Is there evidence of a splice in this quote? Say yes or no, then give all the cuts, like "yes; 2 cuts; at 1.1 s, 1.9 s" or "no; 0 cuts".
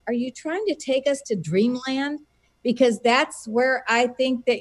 no; 0 cuts